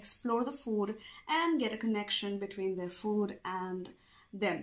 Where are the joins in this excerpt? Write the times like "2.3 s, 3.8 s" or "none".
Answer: none